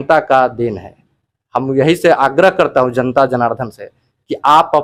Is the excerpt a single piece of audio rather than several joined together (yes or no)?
yes